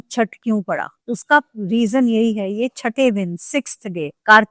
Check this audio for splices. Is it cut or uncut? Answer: uncut